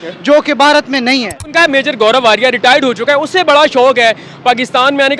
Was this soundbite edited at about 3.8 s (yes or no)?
no